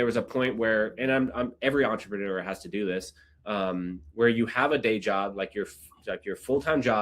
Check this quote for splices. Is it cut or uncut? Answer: uncut